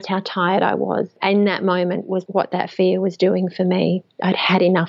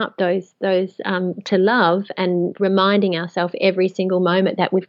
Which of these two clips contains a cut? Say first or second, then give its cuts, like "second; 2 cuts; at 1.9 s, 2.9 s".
first; 2 cuts; at 1.1 s, 2.2 s